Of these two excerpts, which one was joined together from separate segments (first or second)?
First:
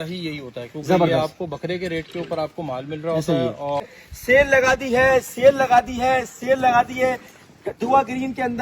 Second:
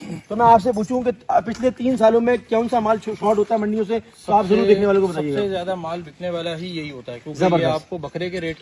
first